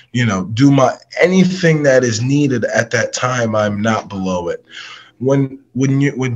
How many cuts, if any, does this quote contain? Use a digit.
0